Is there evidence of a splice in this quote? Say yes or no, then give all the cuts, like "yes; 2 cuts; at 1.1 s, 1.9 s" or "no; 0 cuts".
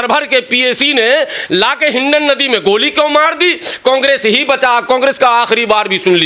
no; 0 cuts